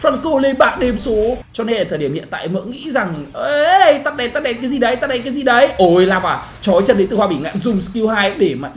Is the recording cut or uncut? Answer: cut